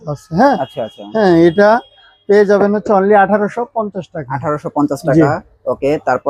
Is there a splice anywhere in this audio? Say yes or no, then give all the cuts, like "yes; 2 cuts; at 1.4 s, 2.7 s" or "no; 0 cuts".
no; 0 cuts